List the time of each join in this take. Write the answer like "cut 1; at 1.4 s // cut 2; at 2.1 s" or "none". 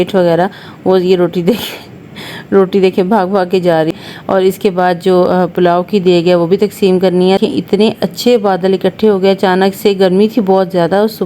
cut 1; at 3.9 s // cut 2; at 7.4 s